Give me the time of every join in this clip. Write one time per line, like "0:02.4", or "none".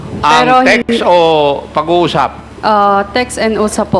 0:02.5